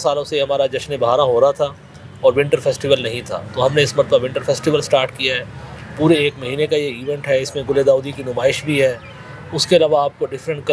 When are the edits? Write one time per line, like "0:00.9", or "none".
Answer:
none